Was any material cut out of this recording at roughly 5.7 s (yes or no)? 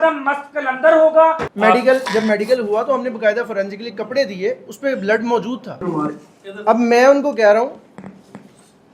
yes